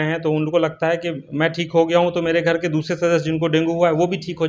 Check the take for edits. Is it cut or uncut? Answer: uncut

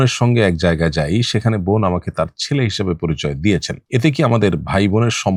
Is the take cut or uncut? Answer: uncut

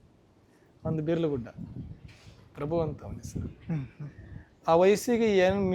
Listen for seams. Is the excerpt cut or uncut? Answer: uncut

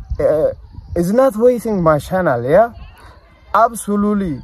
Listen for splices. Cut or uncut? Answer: uncut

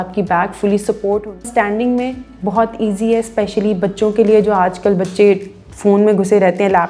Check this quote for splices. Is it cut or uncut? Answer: cut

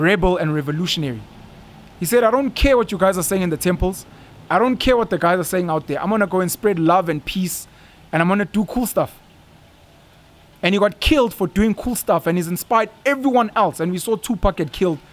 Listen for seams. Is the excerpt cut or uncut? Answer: uncut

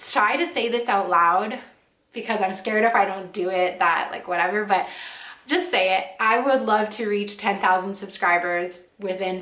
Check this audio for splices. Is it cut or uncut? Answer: uncut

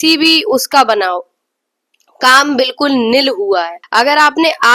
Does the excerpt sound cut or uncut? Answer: cut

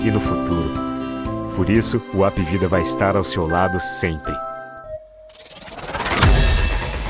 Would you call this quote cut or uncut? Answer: cut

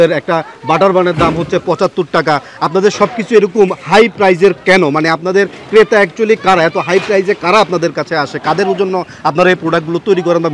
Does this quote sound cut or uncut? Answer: uncut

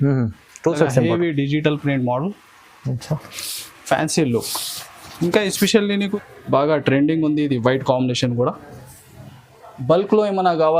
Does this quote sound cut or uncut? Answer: cut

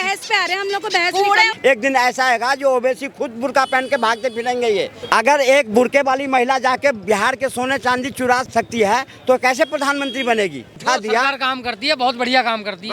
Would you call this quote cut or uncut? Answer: cut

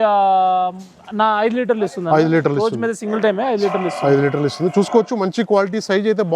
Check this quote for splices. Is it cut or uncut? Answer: uncut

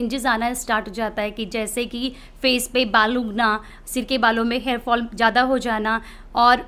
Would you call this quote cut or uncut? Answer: uncut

